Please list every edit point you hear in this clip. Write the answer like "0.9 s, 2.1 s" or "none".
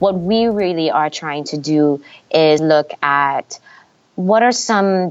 2.6 s